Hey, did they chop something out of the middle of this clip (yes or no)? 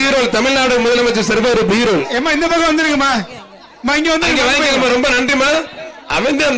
no